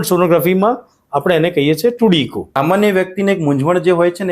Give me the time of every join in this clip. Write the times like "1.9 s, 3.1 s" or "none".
2.4 s